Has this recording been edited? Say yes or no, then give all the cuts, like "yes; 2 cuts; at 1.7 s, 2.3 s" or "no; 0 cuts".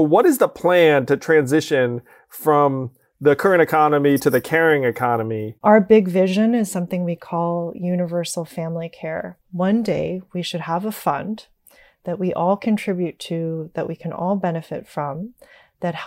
yes; 2 cuts; at 5.5 s, 9.3 s